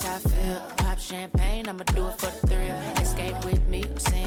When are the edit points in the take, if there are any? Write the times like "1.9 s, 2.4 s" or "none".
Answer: none